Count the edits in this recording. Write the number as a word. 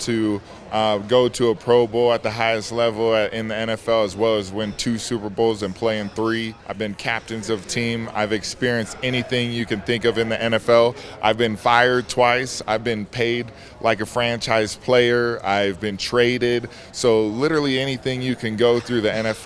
one